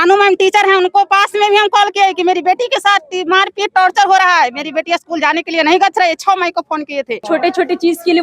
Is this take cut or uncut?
cut